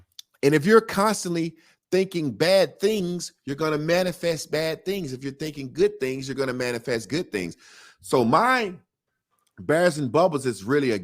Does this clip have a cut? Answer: no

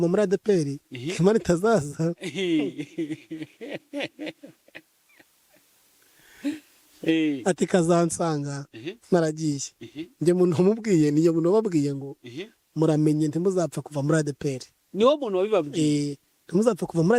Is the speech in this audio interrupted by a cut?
no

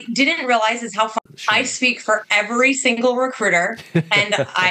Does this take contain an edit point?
yes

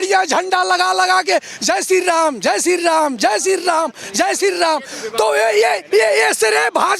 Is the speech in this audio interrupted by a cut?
no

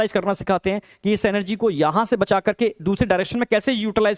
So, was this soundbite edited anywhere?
no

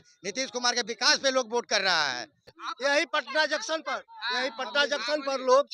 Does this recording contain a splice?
yes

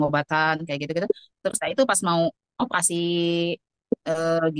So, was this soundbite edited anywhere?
no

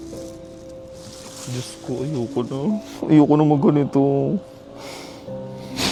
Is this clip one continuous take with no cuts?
yes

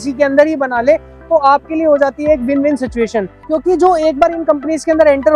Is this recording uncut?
no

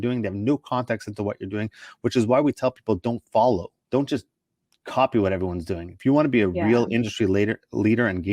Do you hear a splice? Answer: yes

